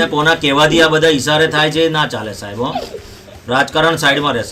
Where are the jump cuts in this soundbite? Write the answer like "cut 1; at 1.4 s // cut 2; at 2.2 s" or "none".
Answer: none